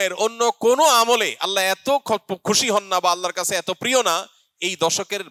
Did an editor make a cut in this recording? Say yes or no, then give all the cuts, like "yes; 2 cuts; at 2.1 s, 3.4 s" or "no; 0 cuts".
no; 0 cuts